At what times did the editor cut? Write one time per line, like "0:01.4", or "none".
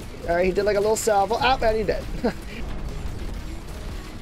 0:02.7